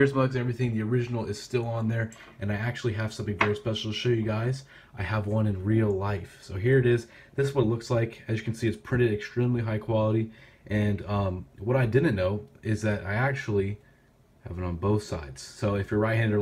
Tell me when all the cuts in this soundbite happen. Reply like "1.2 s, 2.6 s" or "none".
8.8 s